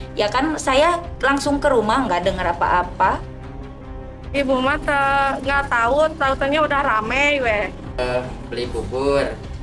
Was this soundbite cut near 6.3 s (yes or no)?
no